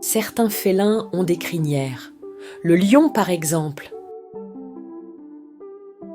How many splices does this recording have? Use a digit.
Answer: 1